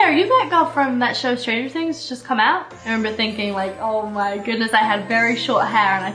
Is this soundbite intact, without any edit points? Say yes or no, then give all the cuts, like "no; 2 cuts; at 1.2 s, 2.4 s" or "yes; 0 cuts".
yes; 0 cuts